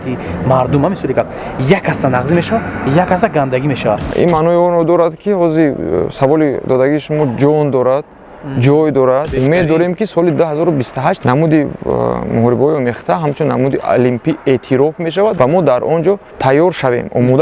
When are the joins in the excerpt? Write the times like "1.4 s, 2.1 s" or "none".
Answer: 4.1 s, 9.3 s, 11.2 s, 15.3 s, 16.3 s